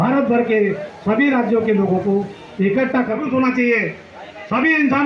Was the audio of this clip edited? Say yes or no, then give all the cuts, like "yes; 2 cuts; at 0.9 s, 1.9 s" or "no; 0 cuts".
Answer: yes; 1 cut; at 3.2 s